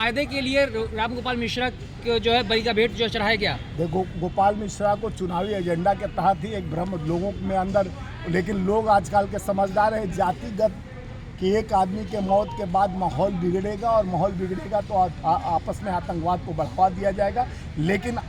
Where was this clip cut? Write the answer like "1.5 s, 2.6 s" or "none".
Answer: none